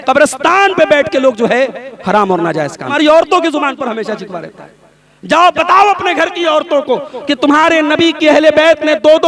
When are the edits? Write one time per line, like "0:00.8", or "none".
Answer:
0:02.9